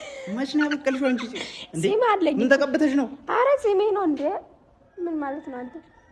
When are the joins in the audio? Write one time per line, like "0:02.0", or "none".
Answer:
none